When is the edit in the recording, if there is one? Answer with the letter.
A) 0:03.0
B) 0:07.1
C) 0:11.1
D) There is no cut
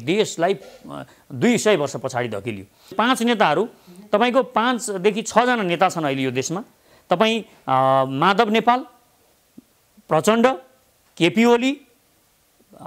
A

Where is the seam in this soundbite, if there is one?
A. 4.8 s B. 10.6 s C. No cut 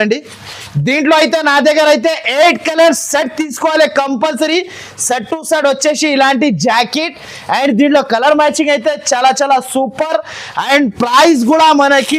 C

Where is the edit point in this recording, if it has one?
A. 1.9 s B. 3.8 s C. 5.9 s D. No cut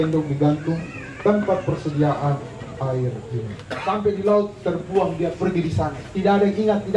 B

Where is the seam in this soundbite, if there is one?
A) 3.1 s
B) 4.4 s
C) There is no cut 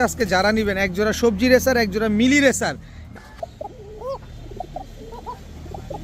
A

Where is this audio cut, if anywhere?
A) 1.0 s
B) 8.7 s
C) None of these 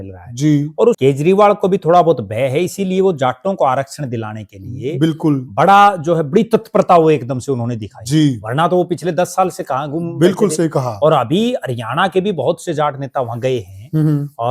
A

